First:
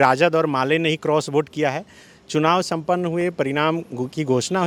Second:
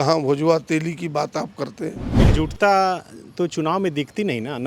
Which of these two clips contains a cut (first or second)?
second